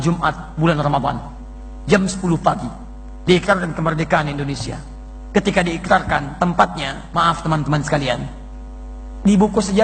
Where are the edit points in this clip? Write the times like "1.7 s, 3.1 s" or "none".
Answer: none